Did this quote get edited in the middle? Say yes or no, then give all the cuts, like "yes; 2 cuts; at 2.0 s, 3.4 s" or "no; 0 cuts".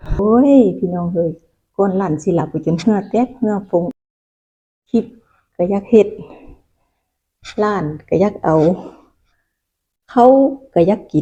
no; 0 cuts